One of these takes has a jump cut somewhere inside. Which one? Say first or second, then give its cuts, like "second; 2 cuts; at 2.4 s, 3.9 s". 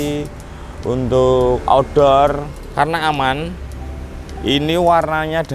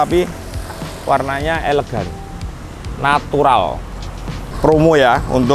second; 1 cut; at 4.5 s